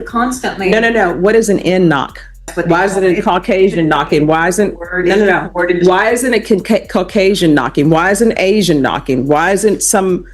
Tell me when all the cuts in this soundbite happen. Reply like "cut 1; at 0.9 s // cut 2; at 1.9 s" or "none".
cut 1; at 2.5 s